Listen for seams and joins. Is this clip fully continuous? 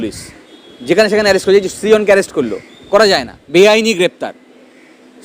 no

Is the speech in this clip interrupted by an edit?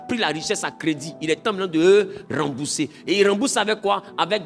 no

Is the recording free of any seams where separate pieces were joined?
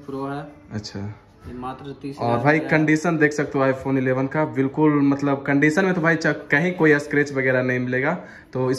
yes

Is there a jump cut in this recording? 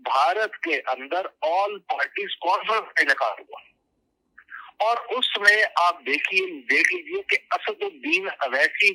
no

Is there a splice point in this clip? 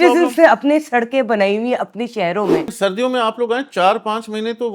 yes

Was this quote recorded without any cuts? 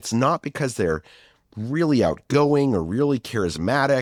yes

